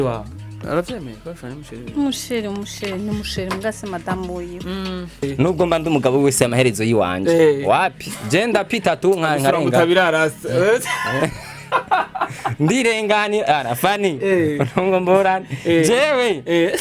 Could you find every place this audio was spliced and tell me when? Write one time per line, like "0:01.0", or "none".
0:05.3